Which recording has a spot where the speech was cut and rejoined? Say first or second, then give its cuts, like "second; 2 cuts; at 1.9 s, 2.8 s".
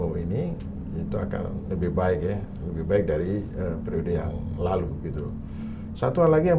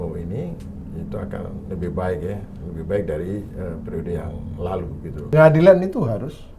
second; 1 cut; at 5.3 s